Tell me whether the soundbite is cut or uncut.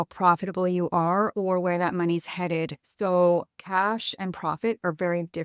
cut